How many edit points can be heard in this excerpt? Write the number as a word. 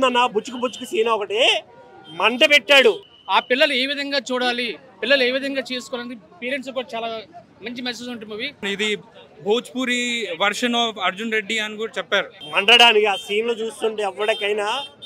three